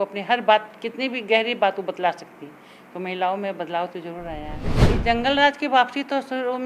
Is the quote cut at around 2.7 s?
no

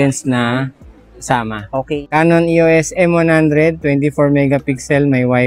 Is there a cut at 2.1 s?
yes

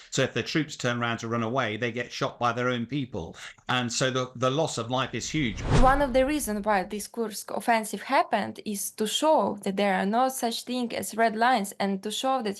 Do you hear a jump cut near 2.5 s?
no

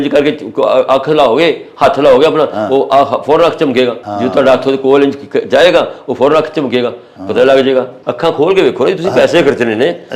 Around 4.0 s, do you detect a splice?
yes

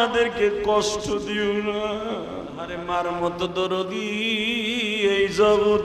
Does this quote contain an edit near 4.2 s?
no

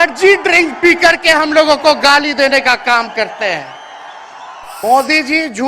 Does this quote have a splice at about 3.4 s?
no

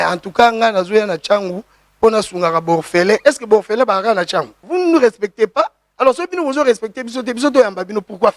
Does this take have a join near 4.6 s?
yes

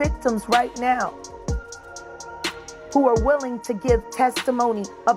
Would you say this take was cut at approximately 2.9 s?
yes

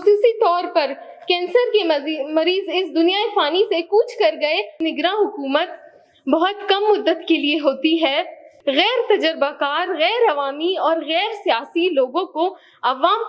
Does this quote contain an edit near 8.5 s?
yes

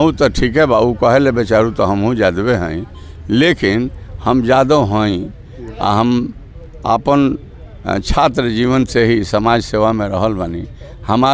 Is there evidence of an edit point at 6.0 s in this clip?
no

